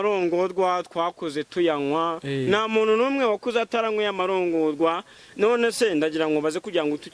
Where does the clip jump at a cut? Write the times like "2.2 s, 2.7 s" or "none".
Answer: none